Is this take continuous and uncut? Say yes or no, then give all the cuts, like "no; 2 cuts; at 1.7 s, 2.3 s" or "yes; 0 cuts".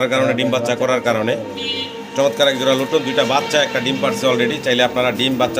yes; 0 cuts